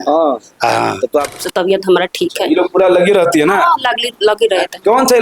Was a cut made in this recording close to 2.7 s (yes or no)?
no